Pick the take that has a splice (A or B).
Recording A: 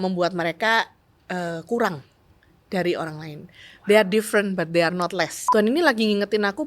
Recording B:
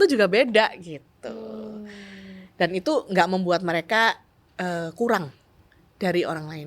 A